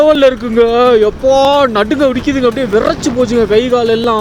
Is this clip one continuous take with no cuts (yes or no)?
yes